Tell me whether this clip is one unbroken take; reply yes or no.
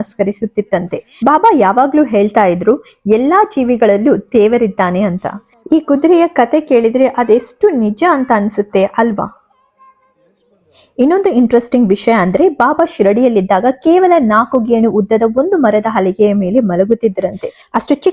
yes